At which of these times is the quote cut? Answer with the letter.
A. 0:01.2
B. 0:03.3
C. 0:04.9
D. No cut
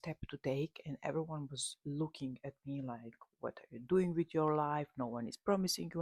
D